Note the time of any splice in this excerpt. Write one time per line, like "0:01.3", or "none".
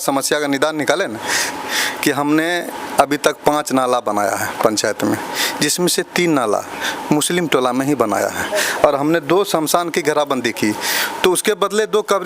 0:01.4
0:08.5